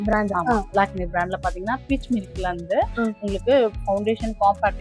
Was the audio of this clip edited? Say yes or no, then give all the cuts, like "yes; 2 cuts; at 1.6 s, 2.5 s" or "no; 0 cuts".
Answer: no; 0 cuts